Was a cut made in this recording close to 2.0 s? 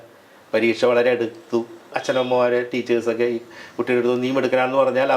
yes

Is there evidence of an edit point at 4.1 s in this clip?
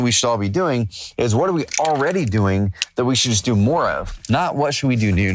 yes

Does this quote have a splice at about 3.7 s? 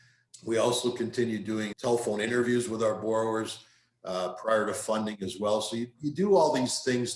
no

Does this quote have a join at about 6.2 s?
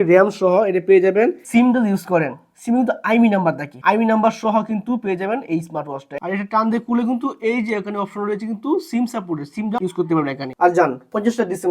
yes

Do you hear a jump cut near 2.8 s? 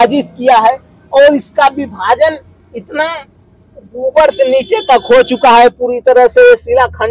no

